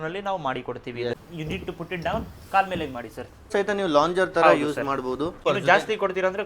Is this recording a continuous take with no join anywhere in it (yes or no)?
no